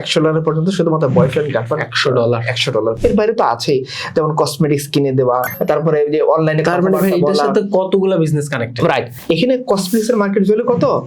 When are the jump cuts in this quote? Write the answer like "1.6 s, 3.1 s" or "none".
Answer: 3.0 s, 5.4 s, 9.1 s